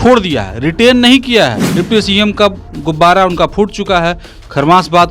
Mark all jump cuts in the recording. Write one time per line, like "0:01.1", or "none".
0:01.7